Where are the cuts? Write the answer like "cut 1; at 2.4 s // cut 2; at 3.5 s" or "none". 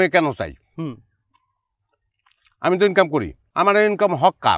cut 1; at 3.4 s